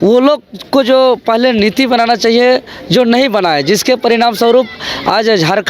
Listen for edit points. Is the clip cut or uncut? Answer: uncut